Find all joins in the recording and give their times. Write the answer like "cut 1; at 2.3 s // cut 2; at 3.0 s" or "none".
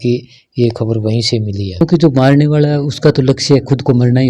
cut 1; at 1.8 s